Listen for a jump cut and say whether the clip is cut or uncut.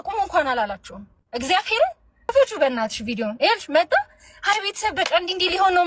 cut